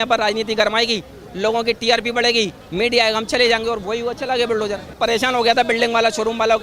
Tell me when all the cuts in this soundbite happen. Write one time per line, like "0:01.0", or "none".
0:04.9